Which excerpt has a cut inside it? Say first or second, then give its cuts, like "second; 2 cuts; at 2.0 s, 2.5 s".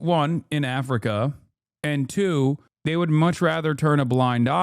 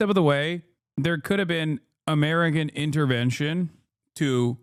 first; 1 cut; at 2.7 s